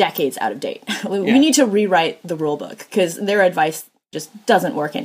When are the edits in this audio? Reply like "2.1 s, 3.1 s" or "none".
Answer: 4.1 s